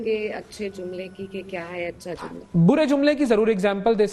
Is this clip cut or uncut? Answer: uncut